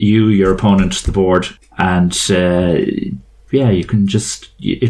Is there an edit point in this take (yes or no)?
yes